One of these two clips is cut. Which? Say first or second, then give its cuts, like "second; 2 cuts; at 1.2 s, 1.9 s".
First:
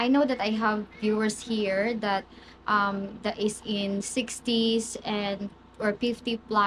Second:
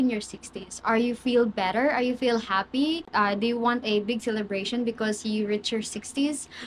second; 1 cut; at 3.1 s